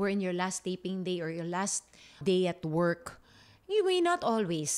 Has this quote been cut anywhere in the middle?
yes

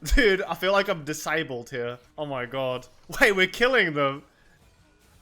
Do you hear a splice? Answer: yes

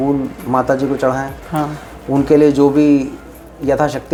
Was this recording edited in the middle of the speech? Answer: no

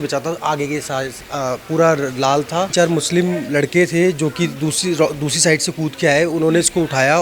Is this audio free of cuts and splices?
no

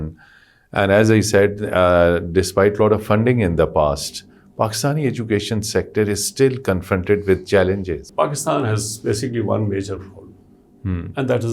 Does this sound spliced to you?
yes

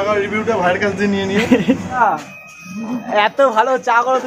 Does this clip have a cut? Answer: yes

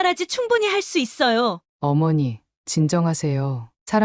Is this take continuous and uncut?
no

